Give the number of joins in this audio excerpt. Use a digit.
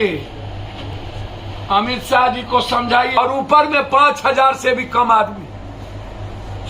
2